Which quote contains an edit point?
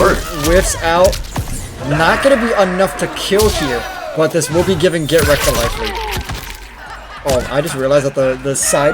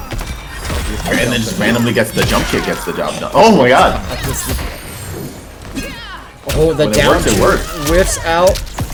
first; 1 cut; at 6.9 s

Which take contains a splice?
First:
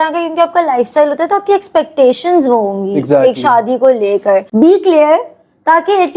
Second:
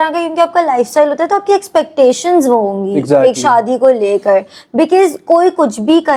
first; 1 cut; at 4.5 s

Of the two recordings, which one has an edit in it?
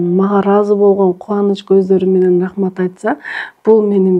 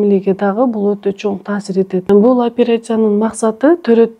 second; 1 cut; at 2.1 s

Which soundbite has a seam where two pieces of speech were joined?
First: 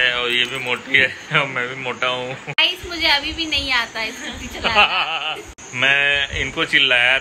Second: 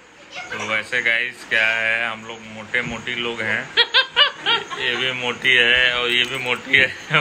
first; 2 cuts; at 2.6 s, 5.6 s

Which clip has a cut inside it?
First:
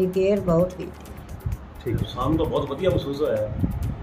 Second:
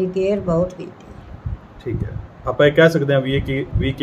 first; 1 cut; at 2.1 s

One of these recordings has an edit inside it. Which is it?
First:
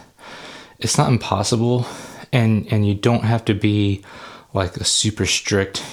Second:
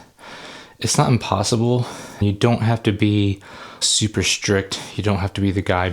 second; 2 cuts; at 2.2 s, 3.8 s

